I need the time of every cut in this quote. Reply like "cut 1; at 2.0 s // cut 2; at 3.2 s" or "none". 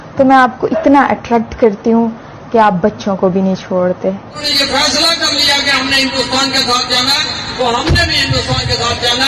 cut 1; at 4.4 s